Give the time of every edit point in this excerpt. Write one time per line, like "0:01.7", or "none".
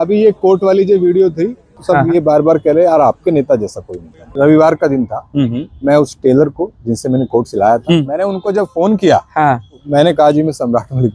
0:01.7
0:04.2
0:08.0
0:09.8